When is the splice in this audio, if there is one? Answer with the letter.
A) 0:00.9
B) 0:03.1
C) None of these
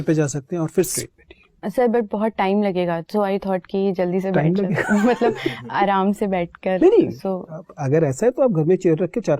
A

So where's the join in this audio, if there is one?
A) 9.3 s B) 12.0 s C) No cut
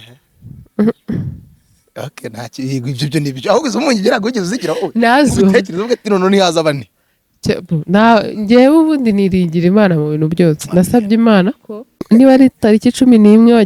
B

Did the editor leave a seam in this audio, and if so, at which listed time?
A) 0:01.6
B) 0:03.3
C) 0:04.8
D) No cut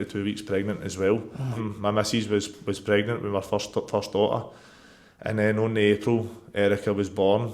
A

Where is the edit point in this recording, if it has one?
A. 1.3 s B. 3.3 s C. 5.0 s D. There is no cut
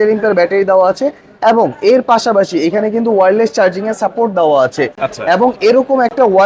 D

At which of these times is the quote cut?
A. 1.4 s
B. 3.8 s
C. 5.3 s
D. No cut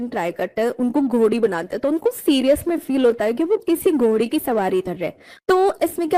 D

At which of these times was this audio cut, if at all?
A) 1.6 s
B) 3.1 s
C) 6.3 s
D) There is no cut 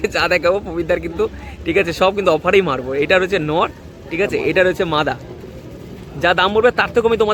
D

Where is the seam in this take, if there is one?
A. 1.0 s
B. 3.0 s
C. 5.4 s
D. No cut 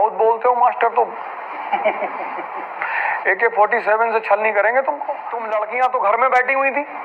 C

